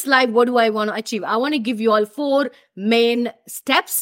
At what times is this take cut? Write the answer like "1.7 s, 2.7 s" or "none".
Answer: none